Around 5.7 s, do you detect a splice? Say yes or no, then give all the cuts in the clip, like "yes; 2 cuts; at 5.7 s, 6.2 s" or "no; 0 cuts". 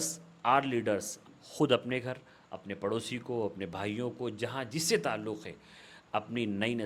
no; 1 cut; at 1.3 s